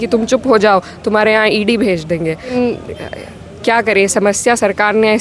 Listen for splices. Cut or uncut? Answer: cut